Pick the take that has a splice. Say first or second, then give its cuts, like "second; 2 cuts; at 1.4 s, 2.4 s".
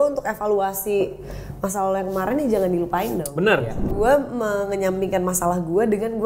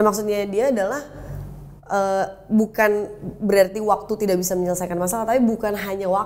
first; 1 cut; at 3.9 s